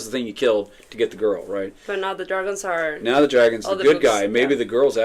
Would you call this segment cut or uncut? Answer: uncut